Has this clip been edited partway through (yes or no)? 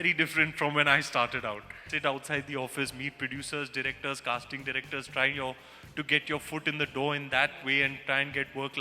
yes